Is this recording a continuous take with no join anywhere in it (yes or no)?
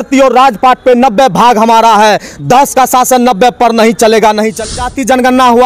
no